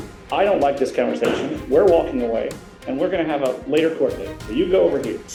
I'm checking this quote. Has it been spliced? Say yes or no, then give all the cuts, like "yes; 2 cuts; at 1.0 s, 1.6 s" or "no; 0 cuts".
no; 0 cuts